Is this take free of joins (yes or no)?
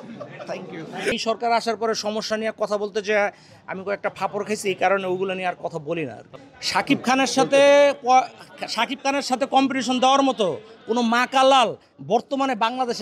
no